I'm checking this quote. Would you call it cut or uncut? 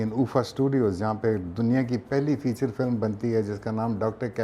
uncut